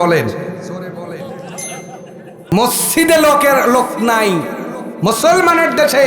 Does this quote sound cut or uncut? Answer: cut